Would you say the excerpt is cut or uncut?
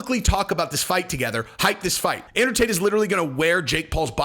cut